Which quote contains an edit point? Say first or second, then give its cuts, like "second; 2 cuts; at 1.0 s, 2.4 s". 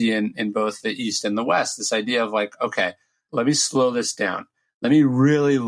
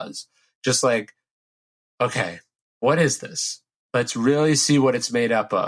first; 1 cut; at 3.2 s